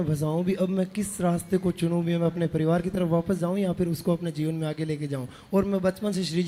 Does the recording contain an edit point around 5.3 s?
no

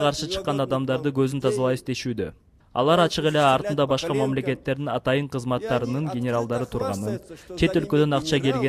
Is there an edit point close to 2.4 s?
no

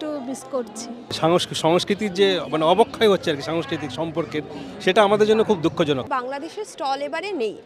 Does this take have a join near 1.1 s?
yes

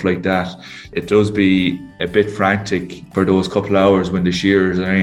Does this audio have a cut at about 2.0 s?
yes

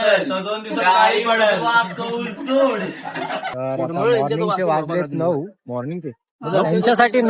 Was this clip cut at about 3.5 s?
yes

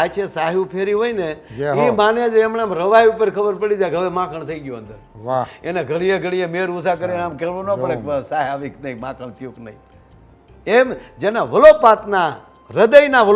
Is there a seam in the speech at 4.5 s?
no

